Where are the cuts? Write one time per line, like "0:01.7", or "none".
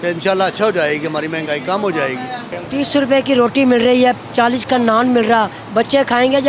0:02.6
0:05.6